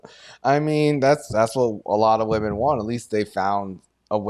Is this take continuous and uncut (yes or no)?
yes